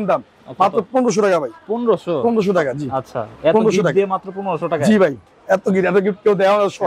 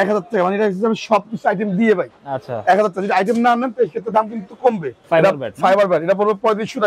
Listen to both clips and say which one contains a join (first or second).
second